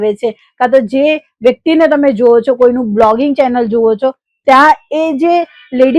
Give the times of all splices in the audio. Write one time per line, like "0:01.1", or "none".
none